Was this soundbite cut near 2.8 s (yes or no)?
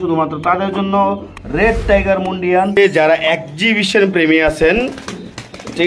yes